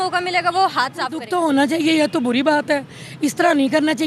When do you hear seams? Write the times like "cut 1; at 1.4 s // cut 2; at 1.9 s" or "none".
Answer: cut 1; at 1.2 s